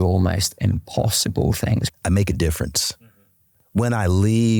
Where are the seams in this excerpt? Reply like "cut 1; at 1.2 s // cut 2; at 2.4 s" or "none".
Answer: cut 1; at 1.8 s